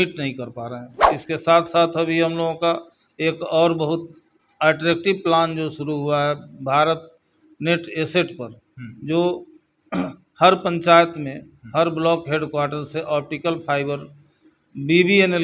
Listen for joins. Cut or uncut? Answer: cut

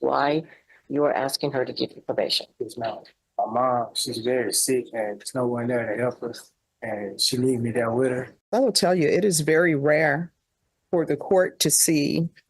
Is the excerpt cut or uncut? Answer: cut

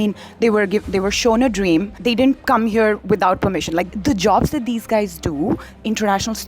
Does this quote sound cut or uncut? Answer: cut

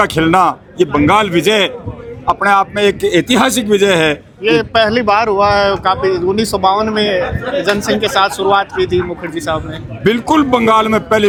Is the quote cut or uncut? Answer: uncut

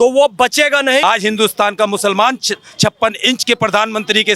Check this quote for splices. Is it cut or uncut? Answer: cut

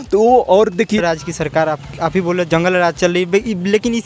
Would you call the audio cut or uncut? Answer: cut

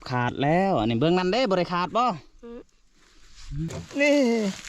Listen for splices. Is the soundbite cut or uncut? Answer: cut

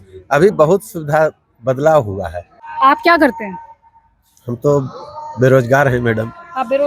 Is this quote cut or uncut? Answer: uncut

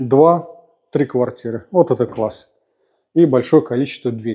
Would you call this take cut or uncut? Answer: uncut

